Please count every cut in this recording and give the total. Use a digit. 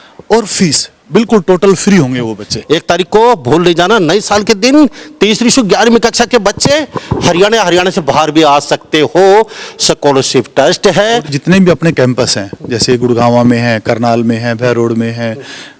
2